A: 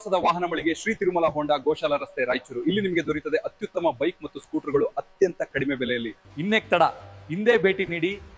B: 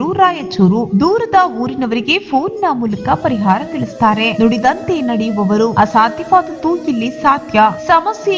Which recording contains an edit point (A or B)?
A